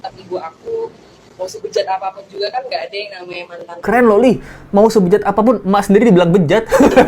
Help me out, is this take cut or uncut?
cut